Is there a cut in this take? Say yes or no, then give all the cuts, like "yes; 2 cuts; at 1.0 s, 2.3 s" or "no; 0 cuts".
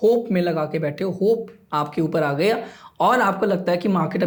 no; 0 cuts